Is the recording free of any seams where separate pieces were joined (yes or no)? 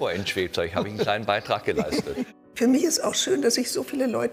no